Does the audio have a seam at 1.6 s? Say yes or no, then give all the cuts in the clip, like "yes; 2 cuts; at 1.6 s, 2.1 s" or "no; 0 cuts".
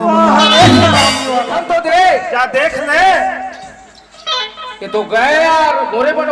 yes; 1 cut; at 1.6 s